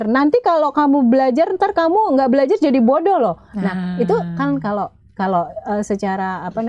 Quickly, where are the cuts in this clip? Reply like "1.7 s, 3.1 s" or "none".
none

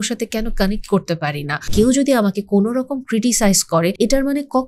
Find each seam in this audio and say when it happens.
1.6 s, 3.9 s

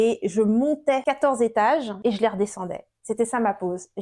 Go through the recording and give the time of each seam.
1.0 s, 1.9 s

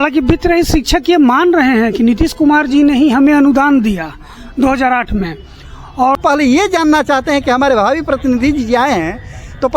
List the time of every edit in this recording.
6.2 s

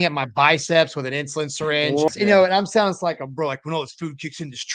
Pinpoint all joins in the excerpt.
2.1 s

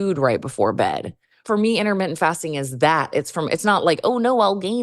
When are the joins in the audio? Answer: 1.4 s

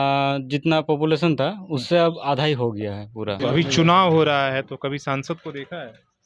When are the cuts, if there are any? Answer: 3.4 s

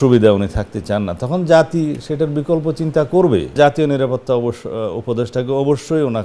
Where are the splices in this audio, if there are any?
3.5 s

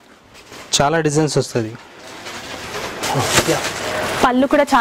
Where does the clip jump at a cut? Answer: 3.0 s

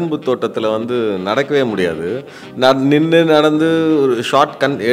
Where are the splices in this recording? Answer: 2.4 s

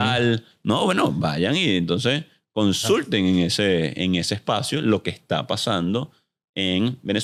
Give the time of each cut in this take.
none

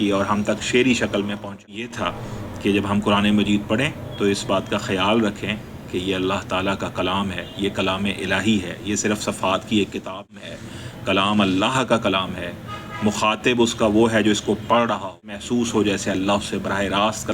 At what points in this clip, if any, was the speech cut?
1.9 s, 10.3 s, 15.4 s

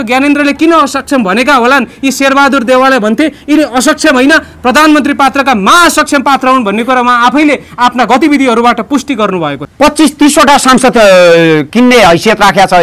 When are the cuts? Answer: 9.6 s

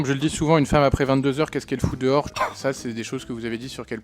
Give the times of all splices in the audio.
2.3 s

